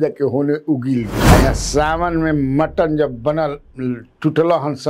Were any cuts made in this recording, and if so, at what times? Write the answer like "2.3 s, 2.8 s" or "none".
1.2 s